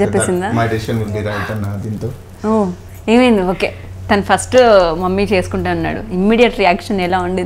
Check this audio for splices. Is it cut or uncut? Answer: uncut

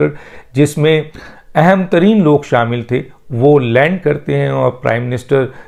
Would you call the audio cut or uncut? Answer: uncut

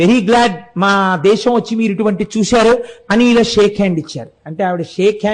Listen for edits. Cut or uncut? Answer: uncut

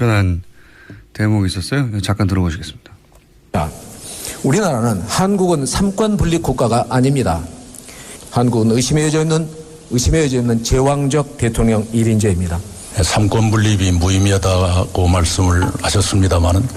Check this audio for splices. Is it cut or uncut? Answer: uncut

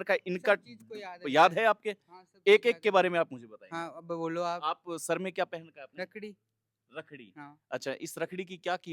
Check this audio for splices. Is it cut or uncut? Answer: uncut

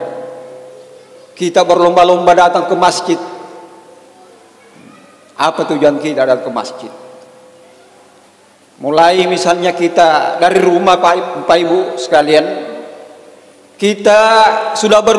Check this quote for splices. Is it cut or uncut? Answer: cut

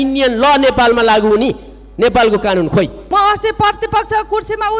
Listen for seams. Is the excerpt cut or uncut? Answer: cut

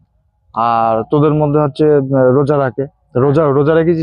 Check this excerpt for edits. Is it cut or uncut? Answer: uncut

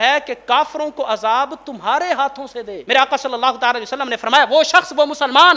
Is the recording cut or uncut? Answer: cut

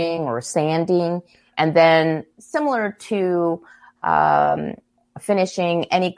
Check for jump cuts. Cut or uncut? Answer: uncut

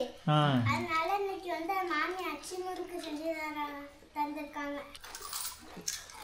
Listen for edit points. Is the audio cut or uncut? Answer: cut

